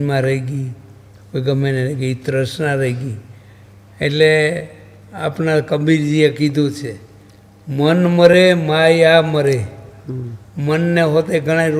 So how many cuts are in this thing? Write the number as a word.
zero